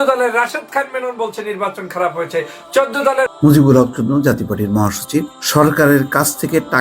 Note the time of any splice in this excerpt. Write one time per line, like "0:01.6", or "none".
0:03.3
0:05.4